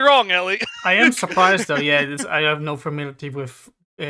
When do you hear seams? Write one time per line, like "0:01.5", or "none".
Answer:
none